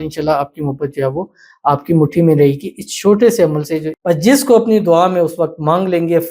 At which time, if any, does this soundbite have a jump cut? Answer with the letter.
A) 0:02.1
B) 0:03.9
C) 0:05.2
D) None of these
B